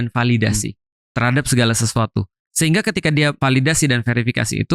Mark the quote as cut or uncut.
cut